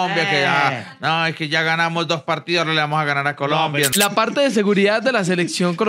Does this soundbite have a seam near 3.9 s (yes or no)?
yes